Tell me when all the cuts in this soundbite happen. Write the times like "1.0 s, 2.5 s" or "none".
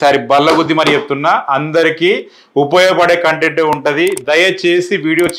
none